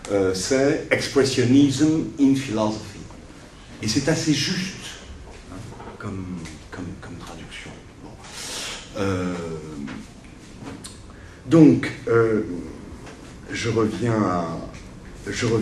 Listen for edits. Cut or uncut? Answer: cut